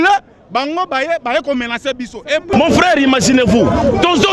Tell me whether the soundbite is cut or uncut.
cut